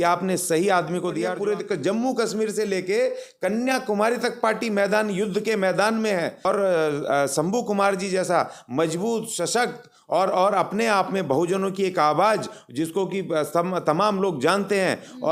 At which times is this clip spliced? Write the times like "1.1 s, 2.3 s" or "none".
1.3 s, 6.4 s